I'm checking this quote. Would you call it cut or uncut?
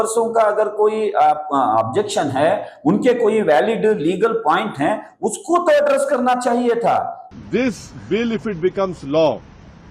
cut